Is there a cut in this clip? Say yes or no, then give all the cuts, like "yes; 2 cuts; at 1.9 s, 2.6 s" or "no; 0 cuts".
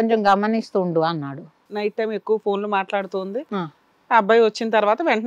yes; 1 cut; at 1.6 s